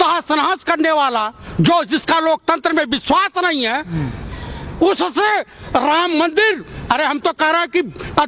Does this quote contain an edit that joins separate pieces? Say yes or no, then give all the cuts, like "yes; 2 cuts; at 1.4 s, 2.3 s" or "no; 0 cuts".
no; 0 cuts